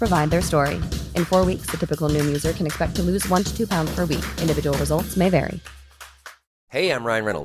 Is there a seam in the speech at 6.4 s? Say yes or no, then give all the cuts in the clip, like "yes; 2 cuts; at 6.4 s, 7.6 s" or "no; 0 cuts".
yes; 1 cut; at 6.4 s